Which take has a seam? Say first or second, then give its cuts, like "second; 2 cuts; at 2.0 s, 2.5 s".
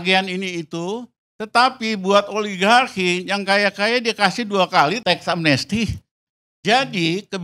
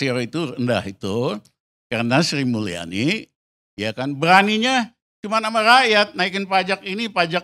first; 2 cuts; at 5.0 s, 6.3 s